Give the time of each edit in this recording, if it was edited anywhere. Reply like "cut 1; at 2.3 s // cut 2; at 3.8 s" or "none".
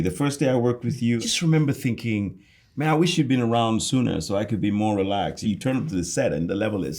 cut 1; at 1.2 s // cut 2; at 5.4 s